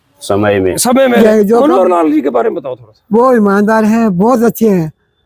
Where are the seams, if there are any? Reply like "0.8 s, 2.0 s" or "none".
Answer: 1.2 s